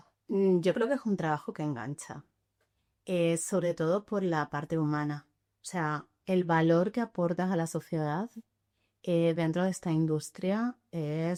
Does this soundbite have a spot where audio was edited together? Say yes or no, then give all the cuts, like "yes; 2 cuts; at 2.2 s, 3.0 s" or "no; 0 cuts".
no; 0 cuts